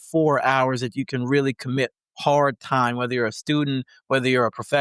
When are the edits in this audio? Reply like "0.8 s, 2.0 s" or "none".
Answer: none